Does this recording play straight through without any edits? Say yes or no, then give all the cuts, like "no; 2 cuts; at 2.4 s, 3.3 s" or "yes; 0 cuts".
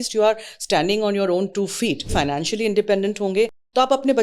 no; 1 cut; at 2.1 s